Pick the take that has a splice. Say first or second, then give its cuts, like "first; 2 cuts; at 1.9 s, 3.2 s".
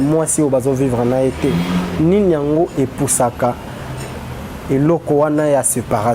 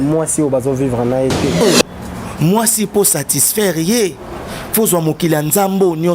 second; 1 cut; at 1.6 s